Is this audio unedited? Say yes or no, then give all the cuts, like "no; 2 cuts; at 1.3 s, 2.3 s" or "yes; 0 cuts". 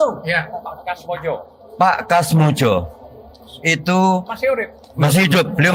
yes; 0 cuts